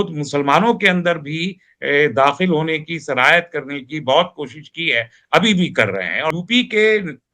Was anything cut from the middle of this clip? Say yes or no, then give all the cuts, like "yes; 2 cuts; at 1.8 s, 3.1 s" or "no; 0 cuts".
yes; 1 cut; at 6.3 s